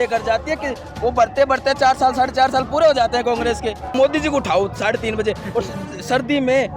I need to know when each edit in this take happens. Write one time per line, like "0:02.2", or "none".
0:03.9